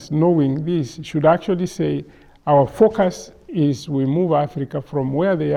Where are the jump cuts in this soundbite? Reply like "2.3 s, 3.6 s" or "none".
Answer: none